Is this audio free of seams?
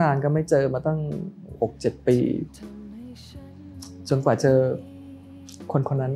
no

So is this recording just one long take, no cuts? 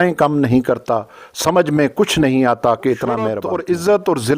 no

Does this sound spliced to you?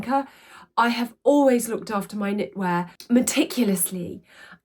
yes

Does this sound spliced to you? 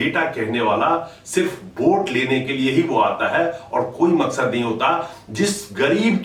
no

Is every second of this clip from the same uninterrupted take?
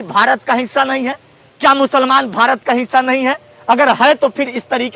yes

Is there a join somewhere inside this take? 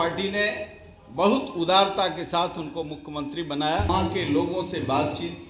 yes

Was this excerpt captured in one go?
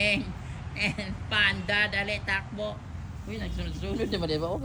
yes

